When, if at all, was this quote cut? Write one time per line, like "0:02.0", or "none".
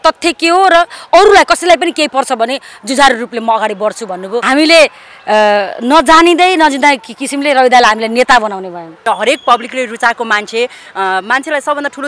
0:04.3
0:08.9